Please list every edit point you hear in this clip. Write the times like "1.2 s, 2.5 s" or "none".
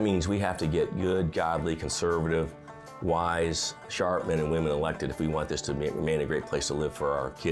none